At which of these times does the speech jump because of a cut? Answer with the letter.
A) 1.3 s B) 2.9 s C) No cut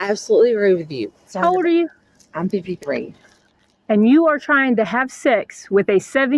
A